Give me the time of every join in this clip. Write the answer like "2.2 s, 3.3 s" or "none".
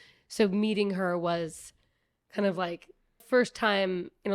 3.2 s